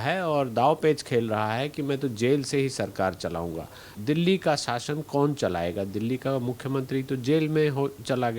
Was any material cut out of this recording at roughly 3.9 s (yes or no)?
yes